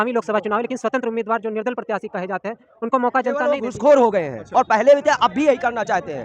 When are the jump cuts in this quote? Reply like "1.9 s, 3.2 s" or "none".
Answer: 3.6 s